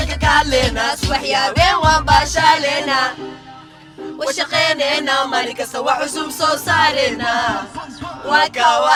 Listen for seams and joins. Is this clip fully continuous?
yes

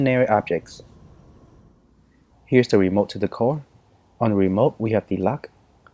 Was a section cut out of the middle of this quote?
no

